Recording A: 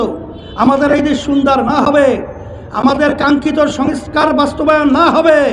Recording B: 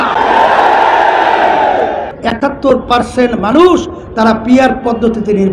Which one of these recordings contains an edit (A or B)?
B